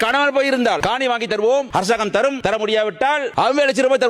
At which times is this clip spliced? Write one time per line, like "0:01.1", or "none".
0:00.8
0:02.4